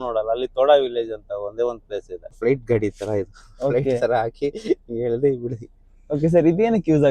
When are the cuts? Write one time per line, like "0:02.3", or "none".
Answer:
0:02.4